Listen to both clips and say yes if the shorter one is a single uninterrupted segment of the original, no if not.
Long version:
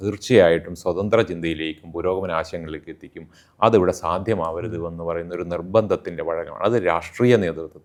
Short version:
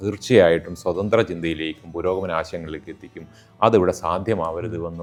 yes